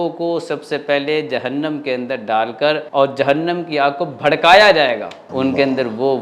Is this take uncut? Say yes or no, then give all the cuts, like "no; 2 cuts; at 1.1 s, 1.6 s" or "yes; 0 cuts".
no; 2 cuts; at 2.8 s, 5.2 s